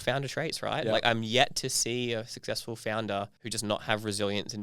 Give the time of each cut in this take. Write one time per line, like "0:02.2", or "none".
0:03.4